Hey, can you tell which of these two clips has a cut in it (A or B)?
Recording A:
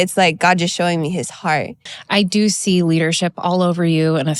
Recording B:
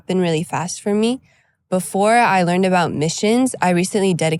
A